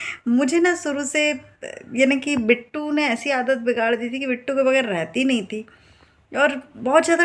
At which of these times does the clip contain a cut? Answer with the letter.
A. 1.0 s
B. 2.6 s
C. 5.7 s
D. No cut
D